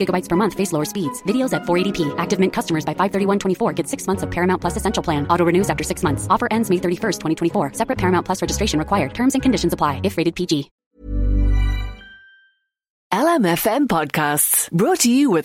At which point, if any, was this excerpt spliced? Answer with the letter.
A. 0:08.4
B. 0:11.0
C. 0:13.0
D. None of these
C